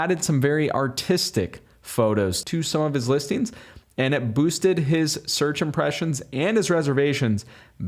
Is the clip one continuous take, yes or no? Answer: no